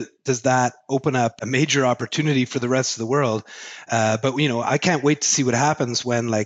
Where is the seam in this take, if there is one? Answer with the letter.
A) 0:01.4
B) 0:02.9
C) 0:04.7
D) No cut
A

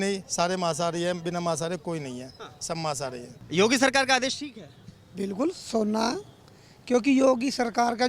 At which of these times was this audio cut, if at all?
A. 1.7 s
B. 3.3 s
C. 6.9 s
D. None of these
D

